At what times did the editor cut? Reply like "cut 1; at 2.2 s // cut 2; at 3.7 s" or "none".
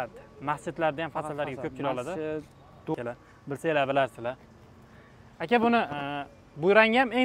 cut 1; at 2.9 s